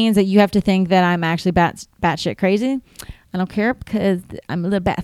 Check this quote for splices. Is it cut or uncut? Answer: uncut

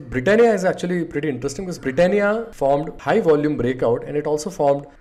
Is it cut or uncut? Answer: cut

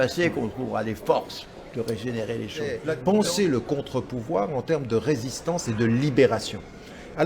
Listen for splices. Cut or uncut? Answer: cut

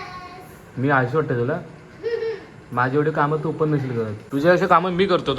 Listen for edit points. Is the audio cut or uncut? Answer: cut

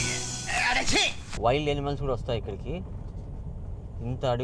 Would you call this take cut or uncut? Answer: cut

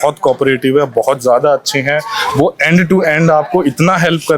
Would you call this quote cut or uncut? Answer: uncut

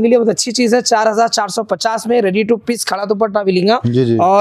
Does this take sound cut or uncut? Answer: uncut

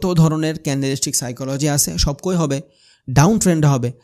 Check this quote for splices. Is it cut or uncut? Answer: uncut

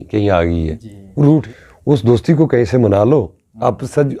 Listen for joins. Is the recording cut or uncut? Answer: cut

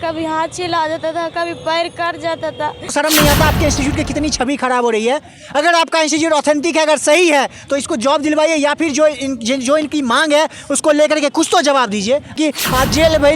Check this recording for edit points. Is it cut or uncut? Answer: cut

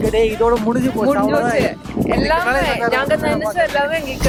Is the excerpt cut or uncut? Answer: uncut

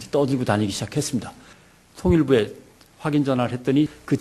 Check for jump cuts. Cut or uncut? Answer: cut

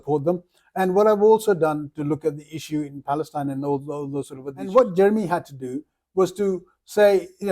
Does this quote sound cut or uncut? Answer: cut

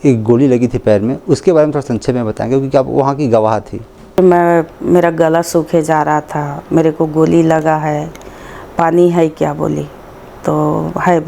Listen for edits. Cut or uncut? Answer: cut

